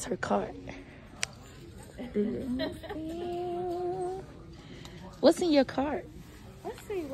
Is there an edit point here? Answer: no; 0 cuts

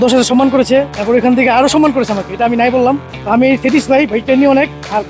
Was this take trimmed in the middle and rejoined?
yes; 2 cuts; at 1.0 s, 3.1 s

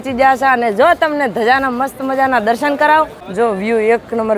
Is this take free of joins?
no; 1 cut; at 3.2 s

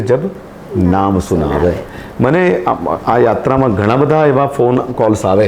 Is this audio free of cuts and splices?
yes; 0 cuts

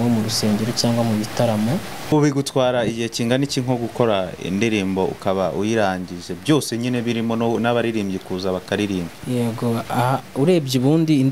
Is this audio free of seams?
no; 1 cut; at 2.1 s

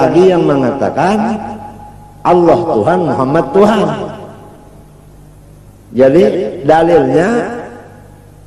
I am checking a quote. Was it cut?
no; 0 cuts

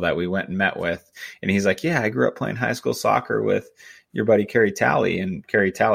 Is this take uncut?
yes; 0 cuts

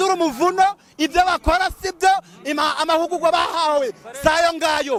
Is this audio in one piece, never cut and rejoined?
yes; 0 cuts

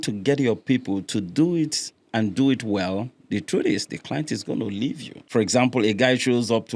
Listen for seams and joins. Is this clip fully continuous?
no; 1 cut; at 5.3 s

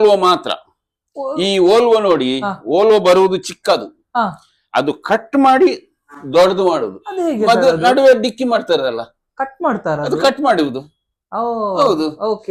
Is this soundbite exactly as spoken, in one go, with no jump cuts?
yes; 0 cuts

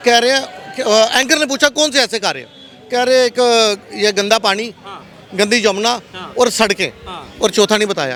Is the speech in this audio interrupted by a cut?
no; 0 cuts

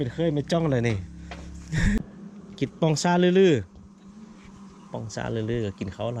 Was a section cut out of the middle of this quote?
yes; 1 cut; at 2.0 s

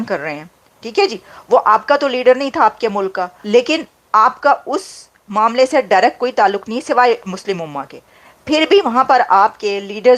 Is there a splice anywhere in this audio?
yes; 1 cut; at 3.3 s

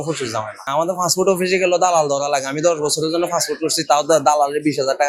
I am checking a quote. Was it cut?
no; 0 cuts

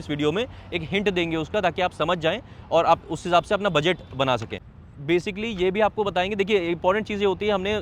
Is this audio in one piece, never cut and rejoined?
no; 1 cut; at 4.5 s

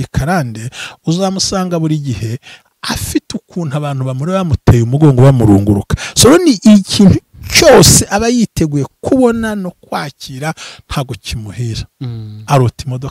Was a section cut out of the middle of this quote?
no; 0 cuts

